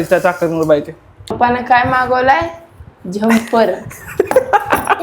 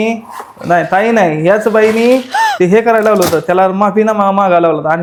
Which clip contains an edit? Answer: first; 1 cut; at 1.3 s

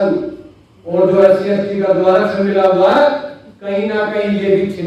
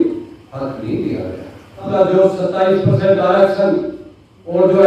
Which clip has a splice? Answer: second; 1 cut; at 1.9 s

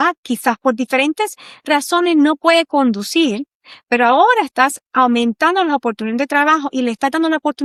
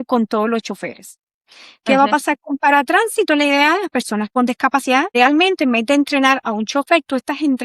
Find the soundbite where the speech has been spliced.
second; 1 cut; at 5.1 s

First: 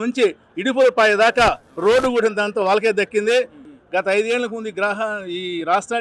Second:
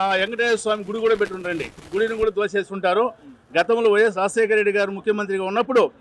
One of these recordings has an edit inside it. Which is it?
first; 1 cut; at 3.6 s

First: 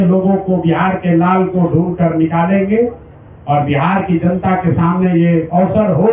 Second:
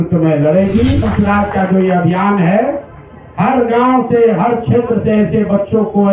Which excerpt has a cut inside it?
second; 1 cut; at 1.1 s

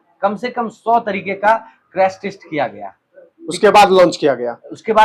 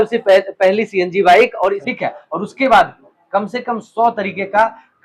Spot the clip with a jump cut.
second; 1 cut; at 1.8 s

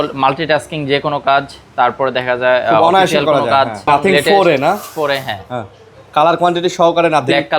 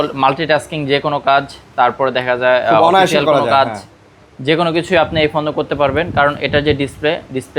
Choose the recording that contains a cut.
first; 1 cut; at 3.9 s

